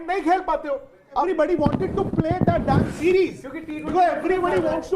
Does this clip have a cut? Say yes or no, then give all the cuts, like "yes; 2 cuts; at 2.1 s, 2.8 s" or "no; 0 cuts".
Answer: yes; 1 cut; at 1.3 s